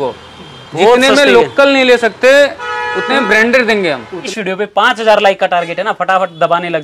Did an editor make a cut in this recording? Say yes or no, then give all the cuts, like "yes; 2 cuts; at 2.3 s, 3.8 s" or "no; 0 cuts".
yes; 1 cut; at 4.2 s